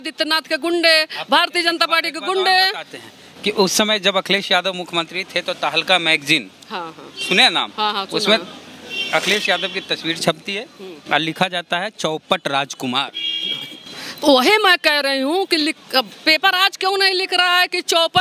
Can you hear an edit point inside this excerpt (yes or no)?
no